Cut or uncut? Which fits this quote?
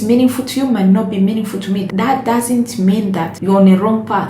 cut